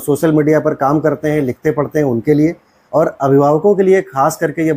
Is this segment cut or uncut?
uncut